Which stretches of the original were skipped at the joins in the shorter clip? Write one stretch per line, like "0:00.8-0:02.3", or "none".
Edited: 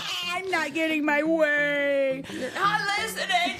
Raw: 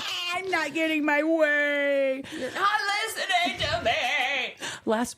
none